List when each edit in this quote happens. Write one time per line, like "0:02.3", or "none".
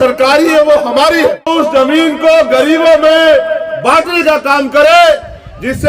0:01.5